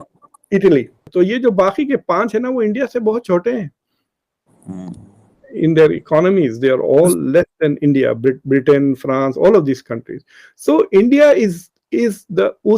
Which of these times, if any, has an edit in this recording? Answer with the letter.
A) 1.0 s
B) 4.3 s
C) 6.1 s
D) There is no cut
A